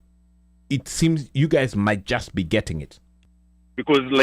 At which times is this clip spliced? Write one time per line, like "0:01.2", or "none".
0:03.2

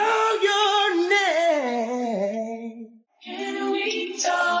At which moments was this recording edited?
none

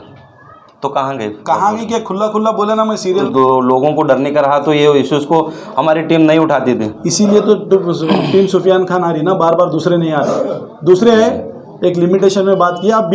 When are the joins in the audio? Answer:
0:03.3

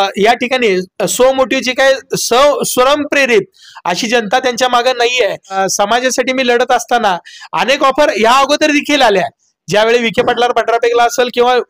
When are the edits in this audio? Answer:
0:05.6

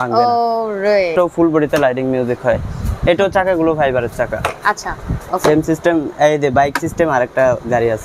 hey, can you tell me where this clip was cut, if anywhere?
0:01.1
0:05.2

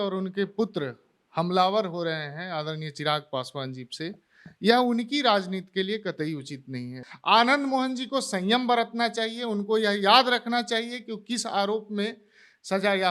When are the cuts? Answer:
0:07.0

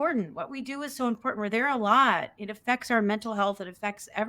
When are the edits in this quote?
none

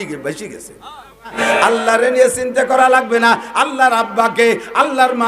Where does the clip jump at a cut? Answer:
0:01.4

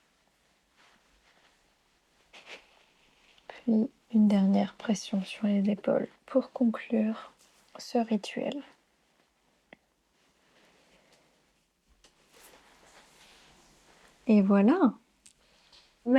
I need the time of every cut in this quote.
0:02.4

